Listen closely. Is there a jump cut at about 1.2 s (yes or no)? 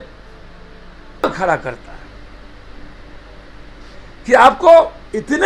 yes